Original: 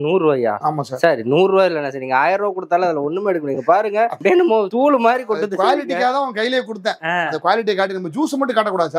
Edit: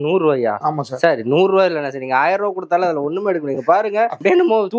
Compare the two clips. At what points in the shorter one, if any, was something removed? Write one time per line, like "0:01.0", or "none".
none

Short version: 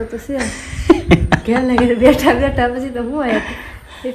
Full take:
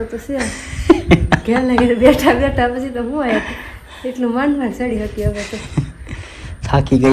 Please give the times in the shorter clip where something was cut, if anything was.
none

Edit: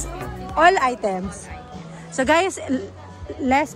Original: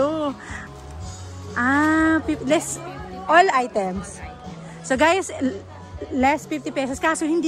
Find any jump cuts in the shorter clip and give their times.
none

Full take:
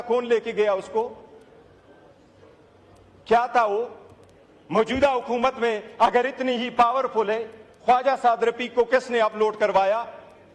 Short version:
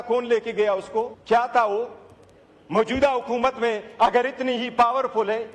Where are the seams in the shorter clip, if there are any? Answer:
0:01.2

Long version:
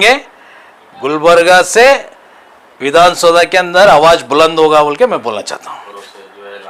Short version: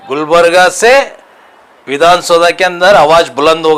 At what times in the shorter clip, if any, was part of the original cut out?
none

